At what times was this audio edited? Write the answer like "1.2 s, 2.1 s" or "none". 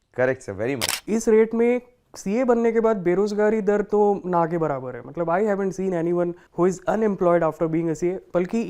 0.9 s